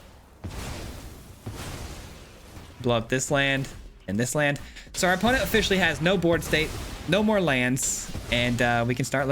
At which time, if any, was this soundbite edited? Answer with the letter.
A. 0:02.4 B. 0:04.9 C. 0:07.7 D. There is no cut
A